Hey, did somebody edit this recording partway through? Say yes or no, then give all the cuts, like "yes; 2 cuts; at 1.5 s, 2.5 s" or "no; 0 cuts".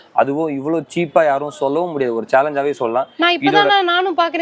no; 0 cuts